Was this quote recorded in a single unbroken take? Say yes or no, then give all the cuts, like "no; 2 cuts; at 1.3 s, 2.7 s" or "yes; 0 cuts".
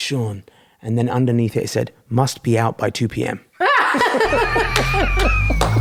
yes; 0 cuts